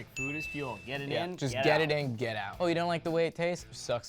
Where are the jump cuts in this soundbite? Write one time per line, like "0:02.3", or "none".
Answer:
none